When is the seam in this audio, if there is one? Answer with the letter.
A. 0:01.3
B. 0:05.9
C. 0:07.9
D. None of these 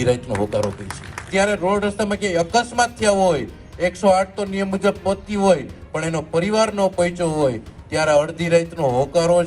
A